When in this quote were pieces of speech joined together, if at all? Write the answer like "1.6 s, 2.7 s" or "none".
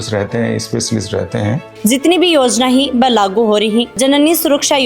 1.7 s, 3.9 s